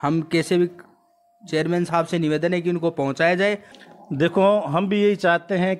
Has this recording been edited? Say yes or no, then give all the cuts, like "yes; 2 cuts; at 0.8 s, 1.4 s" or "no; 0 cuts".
yes; 1 cut; at 3.7 s